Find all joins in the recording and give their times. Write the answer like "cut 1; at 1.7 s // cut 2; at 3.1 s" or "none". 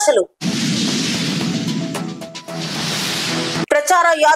none